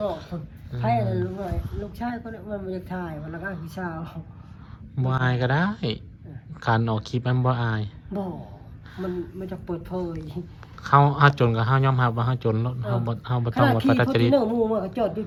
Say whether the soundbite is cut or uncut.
uncut